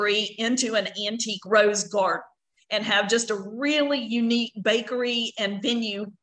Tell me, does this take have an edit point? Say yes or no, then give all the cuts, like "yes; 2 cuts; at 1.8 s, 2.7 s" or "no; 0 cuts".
no; 0 cuts